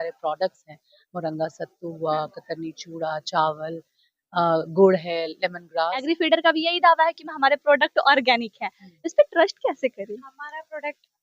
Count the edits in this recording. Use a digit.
1